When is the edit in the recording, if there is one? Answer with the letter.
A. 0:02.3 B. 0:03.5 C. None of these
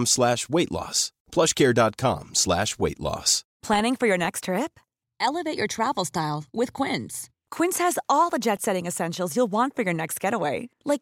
B